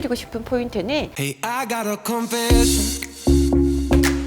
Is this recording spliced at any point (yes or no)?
yes